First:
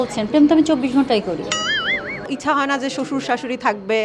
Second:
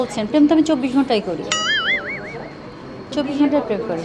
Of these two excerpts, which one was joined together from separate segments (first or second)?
first